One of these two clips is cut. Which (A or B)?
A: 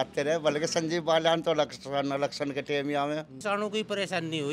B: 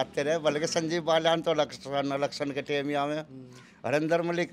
A